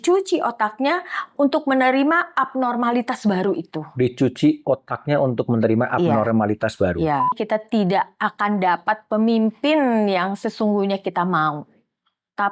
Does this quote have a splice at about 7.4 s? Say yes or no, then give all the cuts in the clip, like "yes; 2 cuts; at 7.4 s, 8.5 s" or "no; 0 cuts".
yes; 1 cut; at 7.4 s